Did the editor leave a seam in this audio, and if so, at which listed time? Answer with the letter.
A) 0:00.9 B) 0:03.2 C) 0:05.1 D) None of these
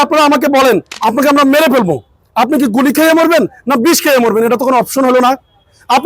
A